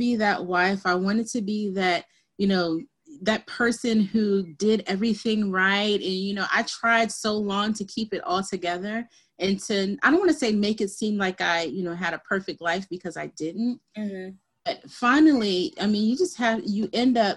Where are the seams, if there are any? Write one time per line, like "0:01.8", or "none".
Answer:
none